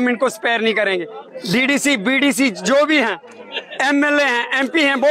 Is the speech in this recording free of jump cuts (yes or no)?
yes